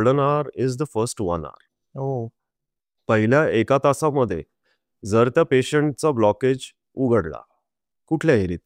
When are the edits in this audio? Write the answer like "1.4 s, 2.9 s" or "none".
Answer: none